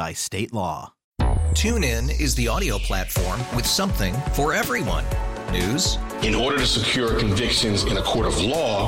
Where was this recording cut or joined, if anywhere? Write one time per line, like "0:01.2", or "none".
0:01.0